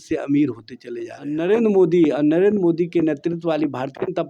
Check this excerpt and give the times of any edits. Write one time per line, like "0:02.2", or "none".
0:01.4

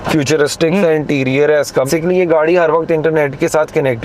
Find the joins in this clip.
0:01.9

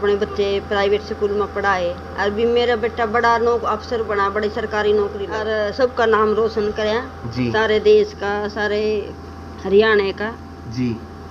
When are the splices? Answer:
0:05.8

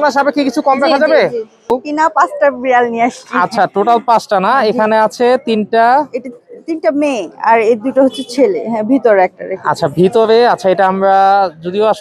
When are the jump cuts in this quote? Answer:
0:01.7

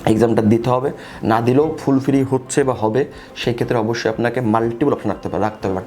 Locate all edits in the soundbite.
none

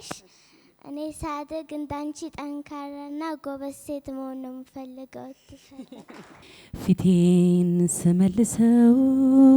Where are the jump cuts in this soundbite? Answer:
0:06.5

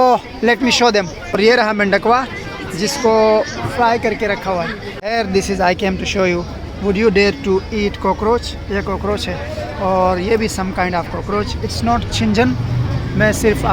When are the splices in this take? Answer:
0:01.3
0:04.9
0:11.6

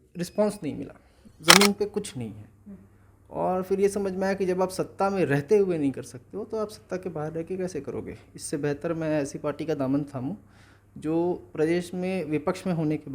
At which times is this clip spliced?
0:01.3

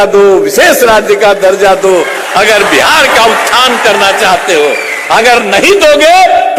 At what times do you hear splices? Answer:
none

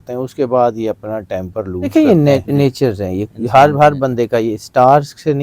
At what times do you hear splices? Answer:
0:01.9

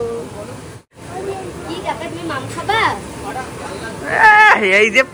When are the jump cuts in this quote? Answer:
0:01.0

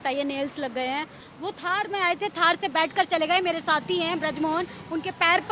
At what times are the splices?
0:01.2

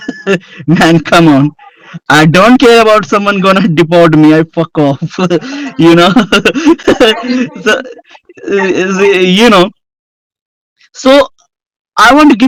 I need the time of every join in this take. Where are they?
none

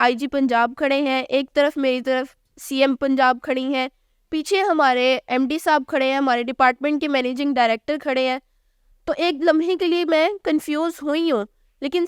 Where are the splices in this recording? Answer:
none

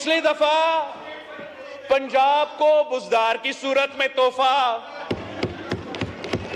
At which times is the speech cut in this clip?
none

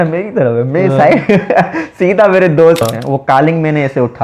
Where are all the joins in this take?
0:02.8

